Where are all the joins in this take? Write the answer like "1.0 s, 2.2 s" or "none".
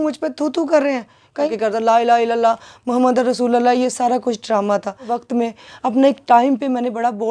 1.5 s, 5.2 s